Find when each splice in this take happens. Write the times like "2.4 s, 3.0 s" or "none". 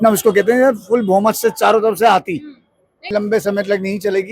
3.1 s